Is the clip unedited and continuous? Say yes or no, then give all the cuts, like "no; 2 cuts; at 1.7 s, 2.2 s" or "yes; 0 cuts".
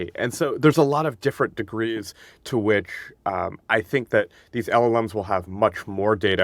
yes; 0 cuts